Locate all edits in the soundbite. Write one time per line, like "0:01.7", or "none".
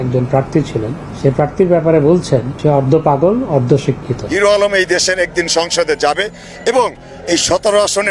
0:04.3